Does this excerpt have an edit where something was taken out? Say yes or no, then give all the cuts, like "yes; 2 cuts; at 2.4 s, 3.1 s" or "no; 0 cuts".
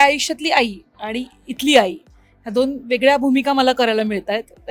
no; 0 cuts